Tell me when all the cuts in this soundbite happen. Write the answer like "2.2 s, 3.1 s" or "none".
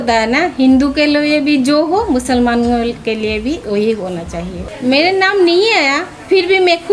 4.6 s

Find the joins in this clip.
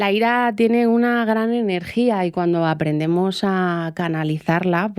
none

